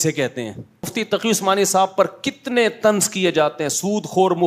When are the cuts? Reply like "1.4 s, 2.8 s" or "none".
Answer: 0.9 s